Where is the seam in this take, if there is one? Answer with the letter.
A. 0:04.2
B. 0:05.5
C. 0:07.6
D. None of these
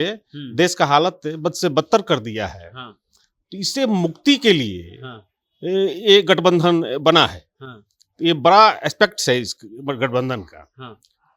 D